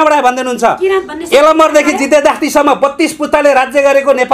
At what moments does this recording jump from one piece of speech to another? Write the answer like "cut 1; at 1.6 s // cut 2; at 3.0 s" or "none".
none